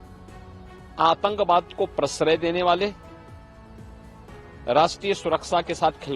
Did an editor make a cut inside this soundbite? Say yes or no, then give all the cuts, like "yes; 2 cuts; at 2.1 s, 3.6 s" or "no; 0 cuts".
yes; 2 cuts; at 3.0 s, 4.6 s